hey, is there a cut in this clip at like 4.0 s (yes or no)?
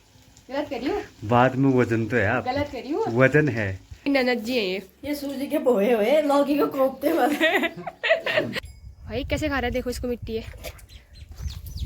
yes